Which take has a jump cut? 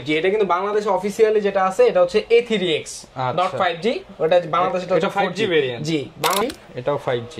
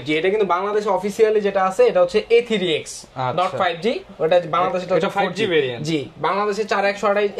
first; 1 cut; at 6.4 s

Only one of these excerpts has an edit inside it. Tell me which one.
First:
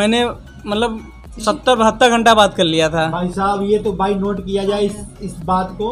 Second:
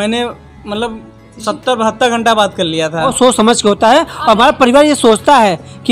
second; 1 cut; at 3.1 s

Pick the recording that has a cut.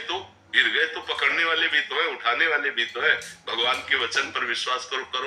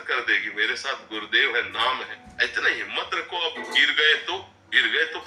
second; 1 cut; at 2.2 s

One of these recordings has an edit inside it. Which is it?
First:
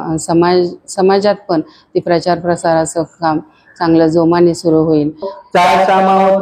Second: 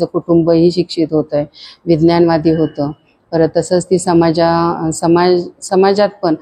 first; 1 cut; at 5.3 s

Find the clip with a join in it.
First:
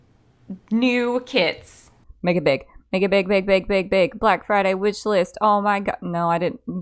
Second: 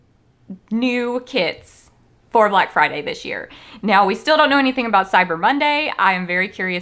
first; 1 cut; at 2.1 s

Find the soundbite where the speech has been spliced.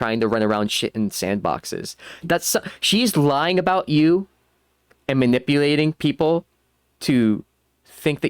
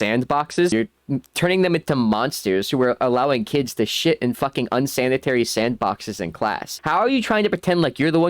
second; 2 cuts; at 0.7 s, 6.7 s

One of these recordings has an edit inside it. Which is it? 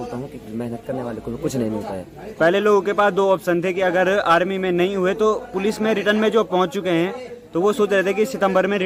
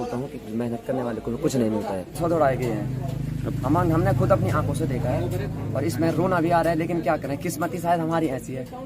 second; 1 cut; at 2.2 s

